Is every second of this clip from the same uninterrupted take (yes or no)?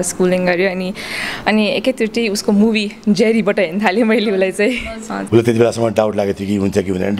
no